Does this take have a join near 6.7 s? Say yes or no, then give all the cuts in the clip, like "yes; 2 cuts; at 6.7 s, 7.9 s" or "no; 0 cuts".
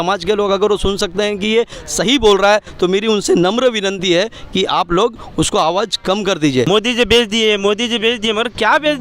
yes; 1 cut; at 6.7 s